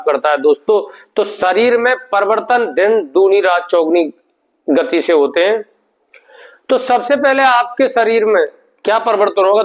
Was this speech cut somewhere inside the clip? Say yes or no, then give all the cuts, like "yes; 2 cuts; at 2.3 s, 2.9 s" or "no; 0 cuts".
no; 0 cuts